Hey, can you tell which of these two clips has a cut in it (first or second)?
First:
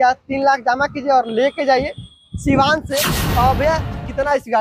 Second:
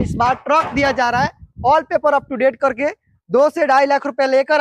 first